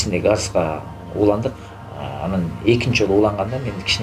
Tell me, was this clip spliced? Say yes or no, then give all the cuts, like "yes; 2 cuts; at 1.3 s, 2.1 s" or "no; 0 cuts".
no; 0 cuts